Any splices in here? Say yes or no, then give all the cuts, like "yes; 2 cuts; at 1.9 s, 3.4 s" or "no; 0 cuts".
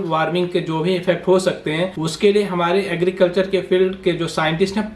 yes; 1 cut; at 2.0 s